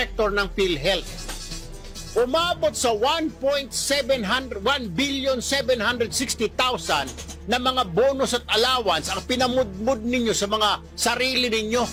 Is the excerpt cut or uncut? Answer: uncut